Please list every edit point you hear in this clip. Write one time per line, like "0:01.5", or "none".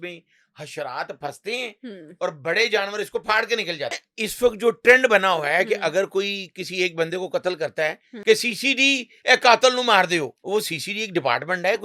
0:04.1
0:08.1
0:10.4